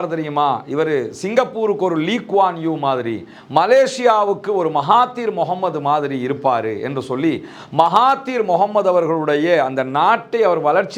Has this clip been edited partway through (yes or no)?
no